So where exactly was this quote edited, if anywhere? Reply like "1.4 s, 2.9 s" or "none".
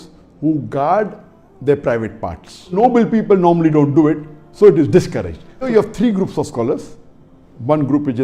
2.7 s, 5.6 s